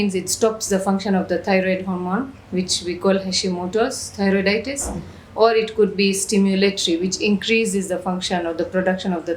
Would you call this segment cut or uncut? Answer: uncut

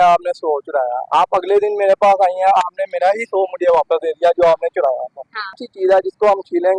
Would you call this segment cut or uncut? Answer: cut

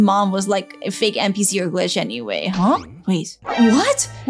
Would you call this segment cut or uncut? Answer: cut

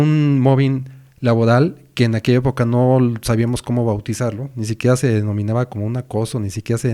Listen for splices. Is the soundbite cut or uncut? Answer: uncut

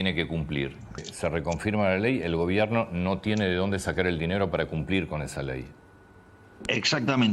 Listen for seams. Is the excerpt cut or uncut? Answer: cut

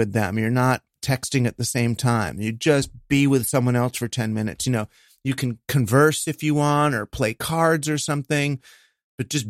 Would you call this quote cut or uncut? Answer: uncut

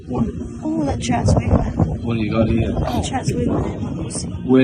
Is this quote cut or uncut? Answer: uncut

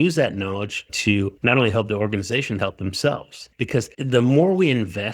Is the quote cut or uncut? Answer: cut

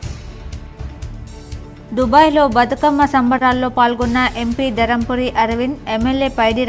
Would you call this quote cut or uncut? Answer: cut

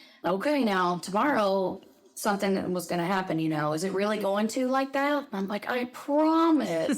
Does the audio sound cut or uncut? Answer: uncut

